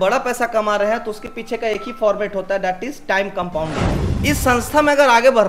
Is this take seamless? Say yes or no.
no